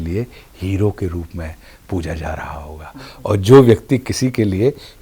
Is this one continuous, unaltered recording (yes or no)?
yes